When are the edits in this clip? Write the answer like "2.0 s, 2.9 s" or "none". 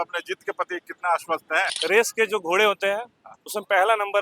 1.7 s